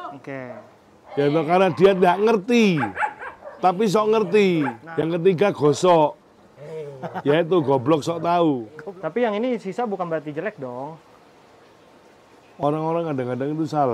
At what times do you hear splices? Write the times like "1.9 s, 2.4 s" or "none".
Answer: 4.8 s, 8.7 s

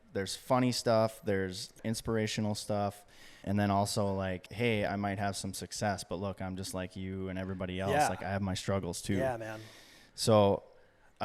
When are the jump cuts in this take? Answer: 1.7 s, 3.4 s, 4.5 s

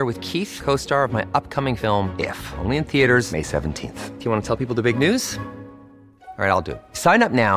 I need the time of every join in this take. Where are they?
none

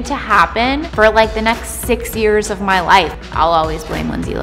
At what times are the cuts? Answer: 0.9 s, 3.1 s

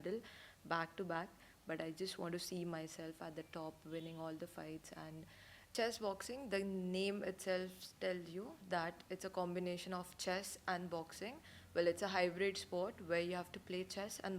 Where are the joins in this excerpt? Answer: 5.7 s

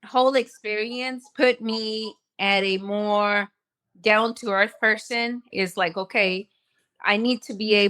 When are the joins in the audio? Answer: 5.5 s

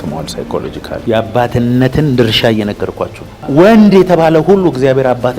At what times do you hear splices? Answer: 1.0 s, 3.3 s

